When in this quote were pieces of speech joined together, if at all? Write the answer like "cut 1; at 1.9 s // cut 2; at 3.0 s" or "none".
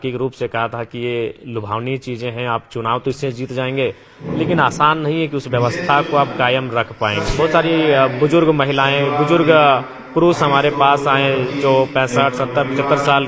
cut 1; at 7.3 s